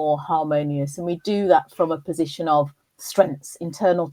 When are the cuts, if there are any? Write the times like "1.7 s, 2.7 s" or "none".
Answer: none